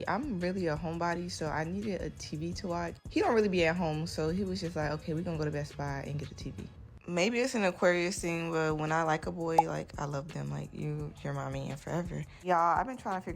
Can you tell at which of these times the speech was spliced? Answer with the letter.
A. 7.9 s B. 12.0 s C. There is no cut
B